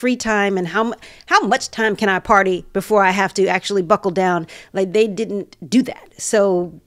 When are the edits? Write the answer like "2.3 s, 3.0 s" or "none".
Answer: none